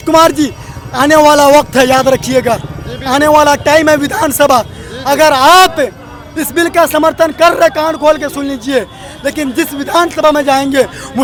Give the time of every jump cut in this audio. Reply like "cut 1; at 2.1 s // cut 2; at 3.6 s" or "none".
none